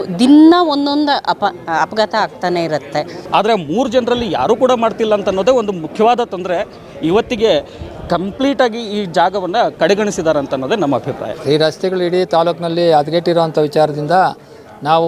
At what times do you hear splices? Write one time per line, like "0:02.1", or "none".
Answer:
0:03.1
0:11.3